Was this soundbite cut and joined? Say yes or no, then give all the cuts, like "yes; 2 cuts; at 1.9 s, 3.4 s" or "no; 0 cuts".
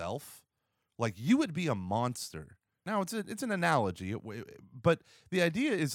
yes; 1 cut; at 2.7 s